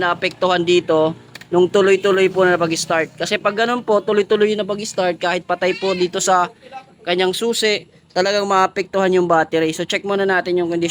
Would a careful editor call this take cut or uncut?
uncut